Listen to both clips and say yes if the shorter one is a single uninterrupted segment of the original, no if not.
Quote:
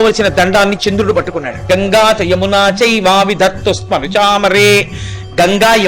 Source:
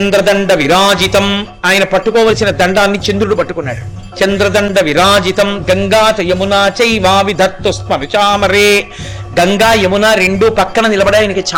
no